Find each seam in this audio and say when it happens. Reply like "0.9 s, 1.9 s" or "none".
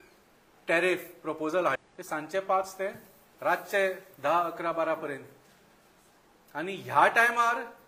1.8 s